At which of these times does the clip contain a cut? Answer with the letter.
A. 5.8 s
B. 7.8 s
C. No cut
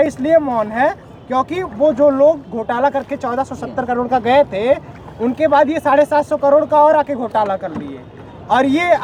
C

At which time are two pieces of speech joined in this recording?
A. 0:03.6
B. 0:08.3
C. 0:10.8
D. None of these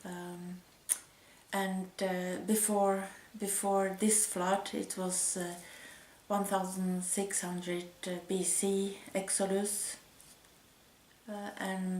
A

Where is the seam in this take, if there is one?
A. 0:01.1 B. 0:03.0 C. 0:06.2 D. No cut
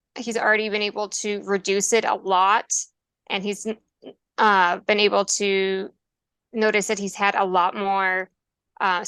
D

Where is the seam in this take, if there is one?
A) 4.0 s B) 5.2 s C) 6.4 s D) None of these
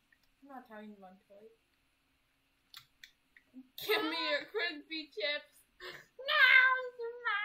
D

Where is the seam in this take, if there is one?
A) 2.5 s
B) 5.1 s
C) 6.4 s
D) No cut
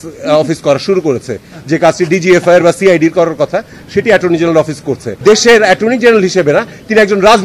B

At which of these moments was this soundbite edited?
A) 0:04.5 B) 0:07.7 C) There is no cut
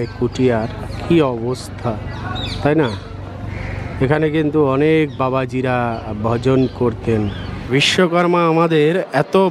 B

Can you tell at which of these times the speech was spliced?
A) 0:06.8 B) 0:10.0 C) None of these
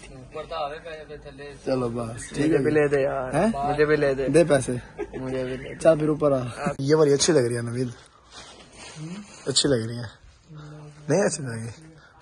A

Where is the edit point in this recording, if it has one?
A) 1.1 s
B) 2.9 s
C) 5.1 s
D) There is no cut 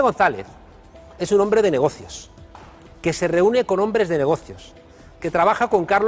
C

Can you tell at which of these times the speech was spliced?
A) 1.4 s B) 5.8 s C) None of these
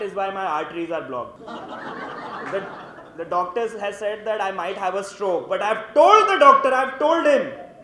A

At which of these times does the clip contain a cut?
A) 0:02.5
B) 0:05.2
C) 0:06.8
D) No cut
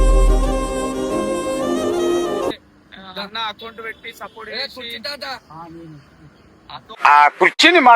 A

